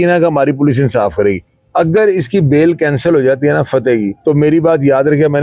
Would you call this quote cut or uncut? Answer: cut